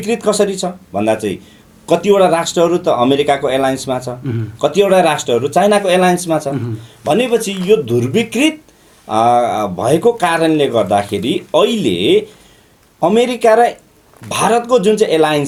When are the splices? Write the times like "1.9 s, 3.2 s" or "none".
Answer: none